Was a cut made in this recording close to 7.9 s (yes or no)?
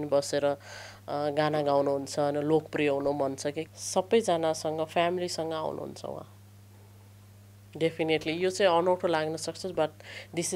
no